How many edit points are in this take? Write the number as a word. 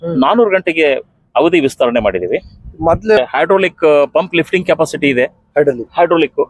one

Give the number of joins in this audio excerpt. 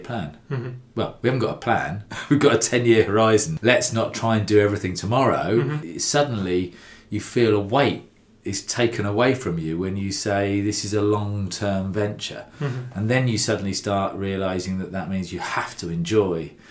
two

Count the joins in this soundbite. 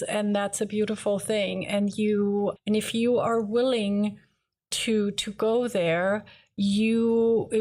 zero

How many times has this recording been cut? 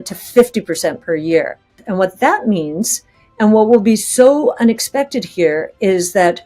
one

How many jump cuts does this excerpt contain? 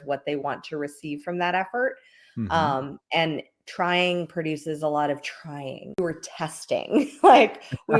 one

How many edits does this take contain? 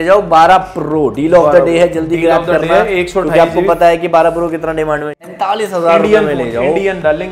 one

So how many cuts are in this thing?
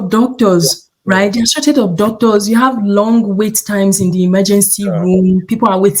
zero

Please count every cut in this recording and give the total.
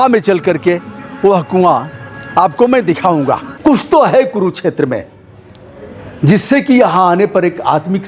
one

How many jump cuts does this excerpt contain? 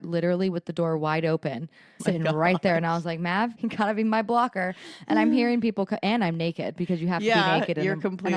one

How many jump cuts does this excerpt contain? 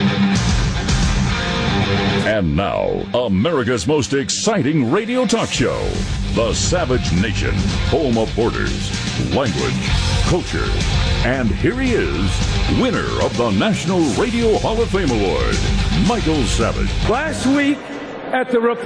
zero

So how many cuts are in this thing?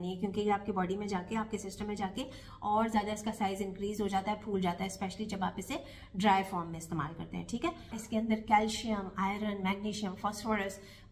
one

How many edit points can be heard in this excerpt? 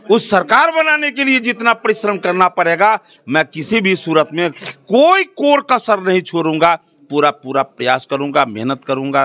zero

